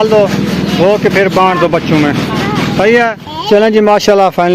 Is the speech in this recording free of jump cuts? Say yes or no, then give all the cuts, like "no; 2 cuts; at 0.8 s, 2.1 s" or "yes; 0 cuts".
no; 1 cut; at 3.2 s